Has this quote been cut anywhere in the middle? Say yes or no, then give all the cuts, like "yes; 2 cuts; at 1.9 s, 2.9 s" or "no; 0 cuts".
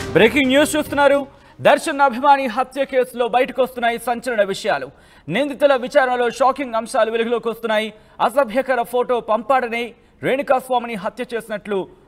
no; 0 cuts